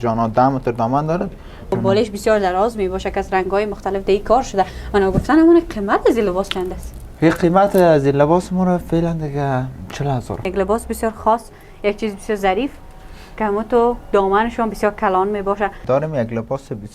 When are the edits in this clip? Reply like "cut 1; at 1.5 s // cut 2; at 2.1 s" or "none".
cut 1; at 1.7 s // cut 2; at 10.5 s // cut 3; at 15.8 s